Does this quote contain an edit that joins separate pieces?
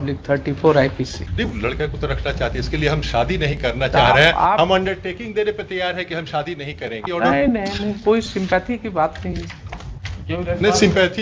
yes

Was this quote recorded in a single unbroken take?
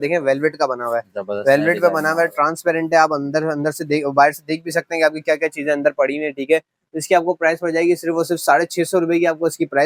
yes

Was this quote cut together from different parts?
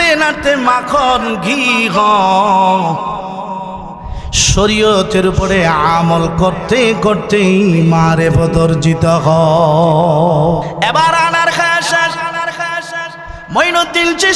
yes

